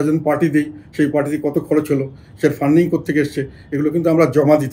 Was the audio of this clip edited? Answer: no; 0 cuts

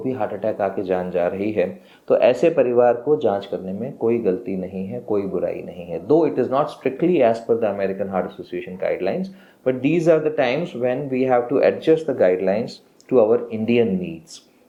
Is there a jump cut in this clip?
no; 0 cuts

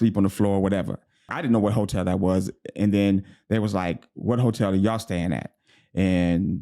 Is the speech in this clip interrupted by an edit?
yes; 1 cut; at 1.3 s

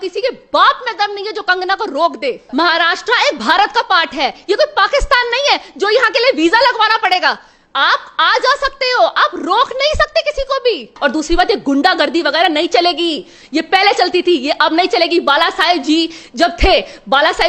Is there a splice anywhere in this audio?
yes; 2 cuts; at 2.4 s, 10.9 s

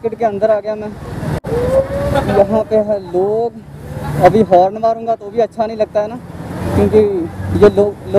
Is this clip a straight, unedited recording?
no; 1 cut; at 1.4 s

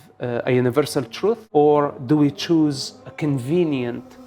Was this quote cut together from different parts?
yes; 2 cuts; at 1.4 s, 3.0 s

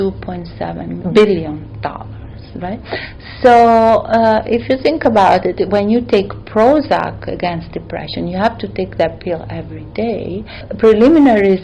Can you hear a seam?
yes; 2 cuts; at 1.0 s, 10.6 s

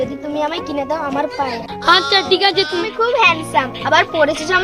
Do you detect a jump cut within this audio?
yes; 1 cut; at 2.8 s

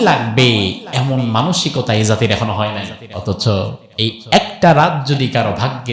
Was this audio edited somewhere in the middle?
yes; 1 cut; at 3.0 s

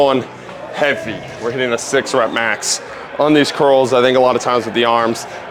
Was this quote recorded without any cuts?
yes; 0 cuts

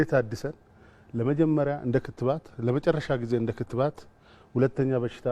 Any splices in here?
no; 0 cuts

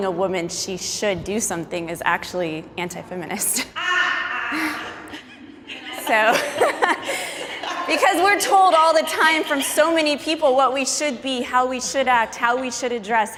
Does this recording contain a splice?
no; 0 cuts

